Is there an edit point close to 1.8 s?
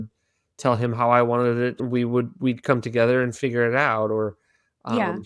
yes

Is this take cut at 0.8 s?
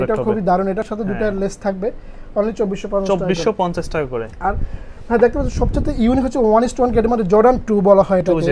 no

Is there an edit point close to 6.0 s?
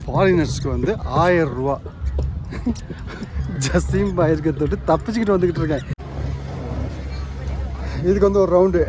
yes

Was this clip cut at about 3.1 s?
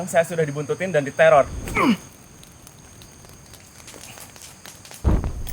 no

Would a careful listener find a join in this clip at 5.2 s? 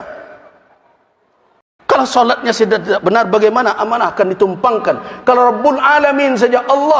no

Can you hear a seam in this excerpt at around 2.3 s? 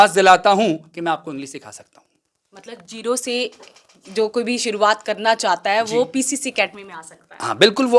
no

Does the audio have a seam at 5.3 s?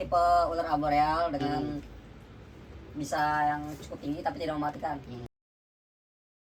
no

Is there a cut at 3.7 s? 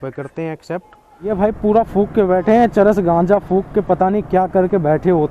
no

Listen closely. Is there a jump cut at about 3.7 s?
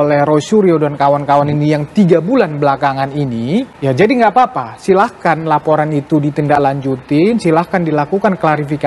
yes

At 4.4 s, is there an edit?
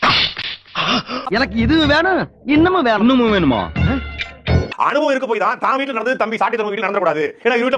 no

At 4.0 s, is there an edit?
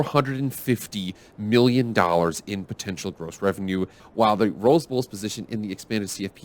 yes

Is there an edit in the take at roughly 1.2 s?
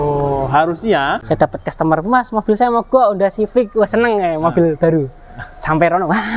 yes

